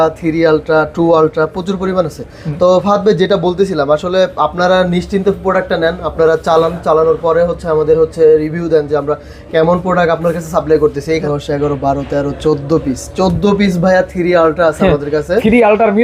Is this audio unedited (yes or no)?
no